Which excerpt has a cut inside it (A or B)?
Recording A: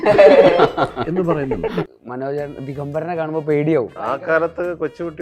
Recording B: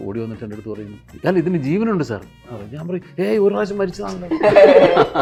A